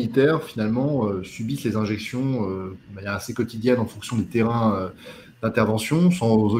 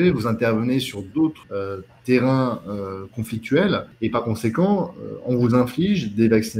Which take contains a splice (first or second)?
second